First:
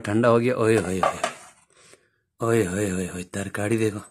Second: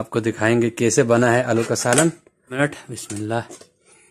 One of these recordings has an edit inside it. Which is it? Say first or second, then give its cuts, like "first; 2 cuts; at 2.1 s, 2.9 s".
second; 1 cut; at 2.6 s